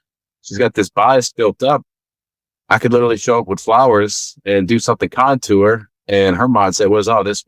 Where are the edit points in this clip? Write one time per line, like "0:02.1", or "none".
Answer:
none